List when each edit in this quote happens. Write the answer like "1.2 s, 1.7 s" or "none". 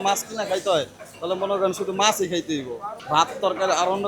2.9 s